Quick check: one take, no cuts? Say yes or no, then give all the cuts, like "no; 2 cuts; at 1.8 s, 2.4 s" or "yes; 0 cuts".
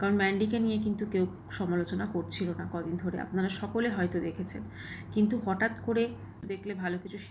no; 1 cut; at 6.4 s